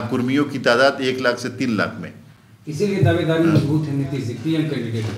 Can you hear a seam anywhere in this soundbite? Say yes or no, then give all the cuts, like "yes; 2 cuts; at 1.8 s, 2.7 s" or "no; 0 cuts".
no; 0 cuts